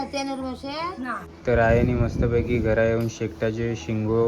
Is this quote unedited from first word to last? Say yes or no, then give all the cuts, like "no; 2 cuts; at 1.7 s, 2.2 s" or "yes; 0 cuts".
no; 1 cut; at 1.3 s